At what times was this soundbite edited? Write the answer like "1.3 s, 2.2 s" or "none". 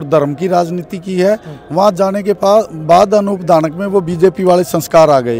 none